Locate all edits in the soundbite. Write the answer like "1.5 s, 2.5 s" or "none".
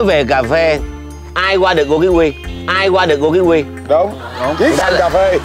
none